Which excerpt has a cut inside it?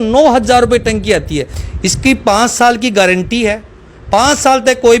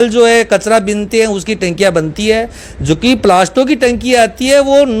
first; 1 cut; at 1.5 s

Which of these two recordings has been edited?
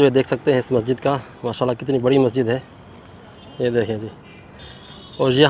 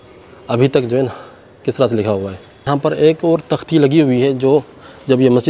second; 1 cut; at 2.7 s

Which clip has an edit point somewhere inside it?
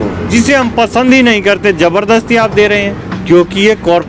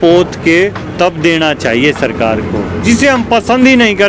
first; 1 cut; at 3.1 s

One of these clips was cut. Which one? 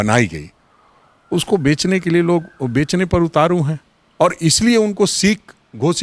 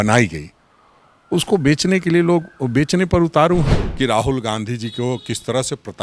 second; 1 cut; at 3.8 s

